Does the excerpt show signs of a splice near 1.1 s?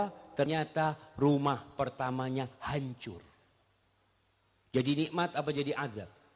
no; 0 cuts

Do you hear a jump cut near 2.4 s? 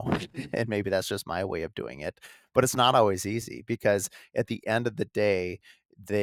no; 0 cuts

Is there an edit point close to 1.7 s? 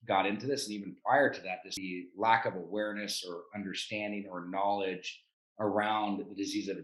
yes; 1 cut; at 1.7 s

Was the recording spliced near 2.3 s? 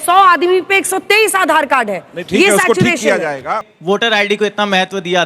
no; 1 cut; at 3.7 s

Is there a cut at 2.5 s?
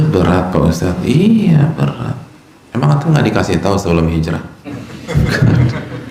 no; 0 cuts

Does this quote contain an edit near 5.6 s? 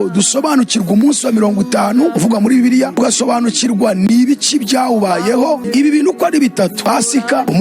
yes; 1 cut; at 5.6 s

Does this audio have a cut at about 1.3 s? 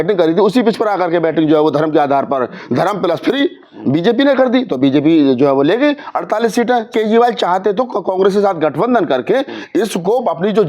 no; 1 cut; at 6.9 s

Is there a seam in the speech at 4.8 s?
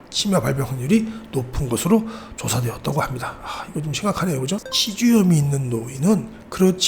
yes; 1 cut; at 4.8 s

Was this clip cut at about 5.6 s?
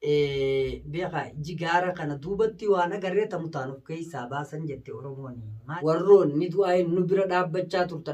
yes; 1 cut; at 5.6 s

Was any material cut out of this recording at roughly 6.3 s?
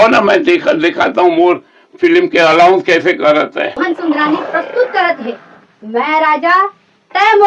no; 1 cut; at 3.8 s

